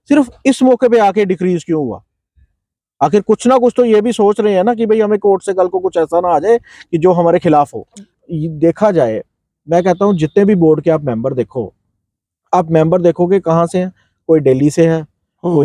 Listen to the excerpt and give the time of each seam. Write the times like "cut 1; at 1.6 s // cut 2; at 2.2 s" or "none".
cut 1; at 8.1 s